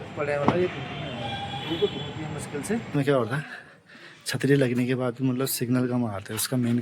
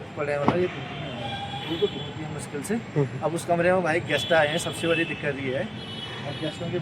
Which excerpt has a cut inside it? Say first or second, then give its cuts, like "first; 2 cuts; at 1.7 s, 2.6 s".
first; 1 cut; at 2.9 s